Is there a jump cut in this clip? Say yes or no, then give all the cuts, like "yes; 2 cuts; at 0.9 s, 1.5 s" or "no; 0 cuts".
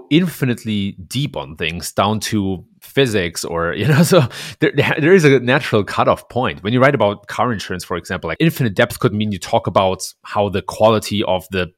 no; 0 cuts